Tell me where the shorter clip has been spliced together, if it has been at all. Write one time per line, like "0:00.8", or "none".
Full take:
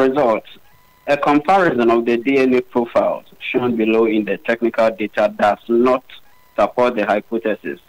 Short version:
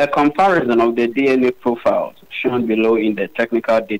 none